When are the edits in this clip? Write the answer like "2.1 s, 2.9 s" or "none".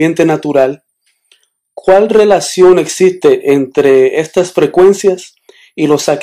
3.2 s